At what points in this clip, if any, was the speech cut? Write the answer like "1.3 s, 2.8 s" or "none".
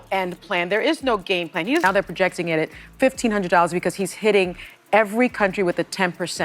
1.8 s